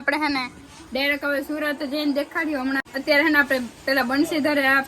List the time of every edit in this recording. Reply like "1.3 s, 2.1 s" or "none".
2.8 s